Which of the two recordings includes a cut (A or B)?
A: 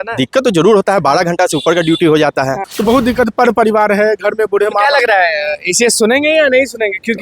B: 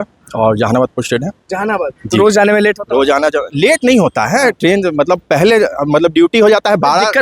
A